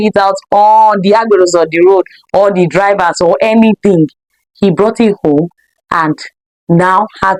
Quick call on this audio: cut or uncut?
uncut